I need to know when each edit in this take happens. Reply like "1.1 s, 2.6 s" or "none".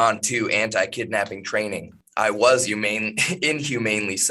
2.0 s